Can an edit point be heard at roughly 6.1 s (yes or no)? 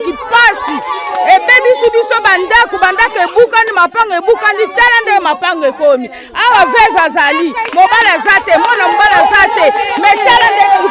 no